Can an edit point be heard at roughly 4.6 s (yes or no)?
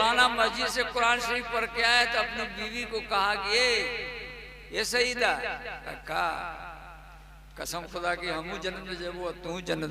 no